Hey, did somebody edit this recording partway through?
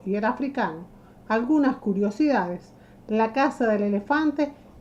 no; 0 cuts

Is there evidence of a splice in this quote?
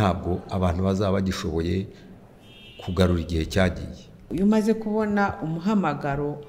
yes; 1 cut; at 4.2 s

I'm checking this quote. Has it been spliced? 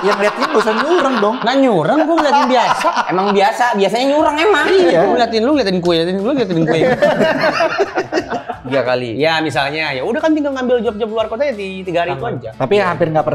yes; 1 cut; at 8.5 s

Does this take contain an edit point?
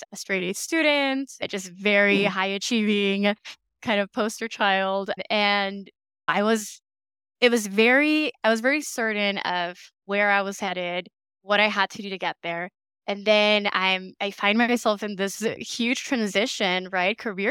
no; 0 cuts

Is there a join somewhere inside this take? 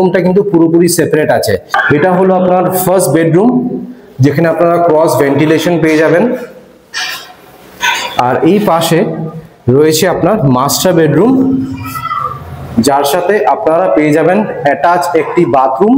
yes; 1 cut; at 1.7 s

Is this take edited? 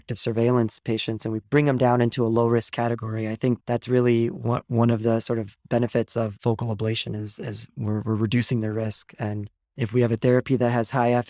no; 0 cuts

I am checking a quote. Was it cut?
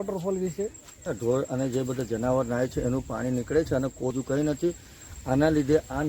yes; 2 cuts; at 1.1 s, 4.1 s

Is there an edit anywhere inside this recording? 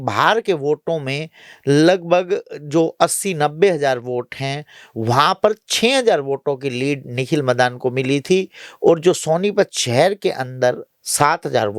no; 0 cuts

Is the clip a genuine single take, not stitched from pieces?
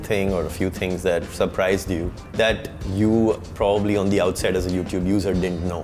yes; 0 cuts

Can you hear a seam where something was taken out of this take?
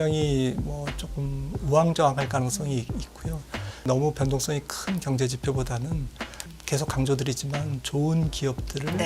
yes; 2 cuts; at 3.8 s, 6.5 s

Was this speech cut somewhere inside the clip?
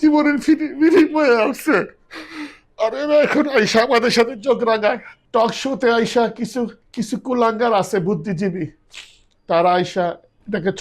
yes; 2 cuts; at 5.1 s, 6.8 s

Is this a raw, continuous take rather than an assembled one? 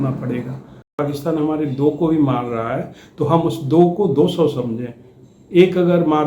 no; 1 cut; at 1.0 s

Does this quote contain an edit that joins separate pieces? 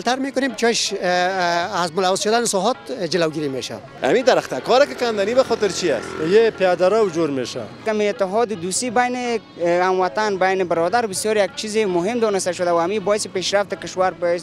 yes; 2 cuts; at 3.9 s, 7.8 s

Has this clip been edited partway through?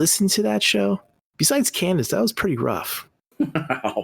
yes; 1 cut; at 3.1 s

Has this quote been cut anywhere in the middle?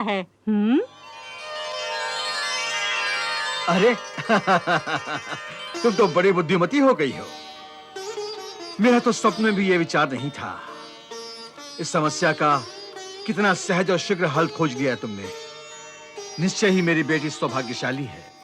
no; 0 cuts

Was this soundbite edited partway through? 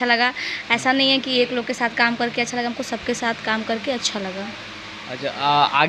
no; 0 cuts

